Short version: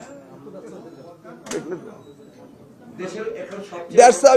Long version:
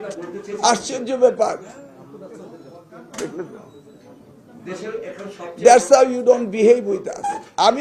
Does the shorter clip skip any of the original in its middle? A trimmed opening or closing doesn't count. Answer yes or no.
no